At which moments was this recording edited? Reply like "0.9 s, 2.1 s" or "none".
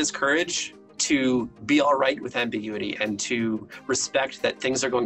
none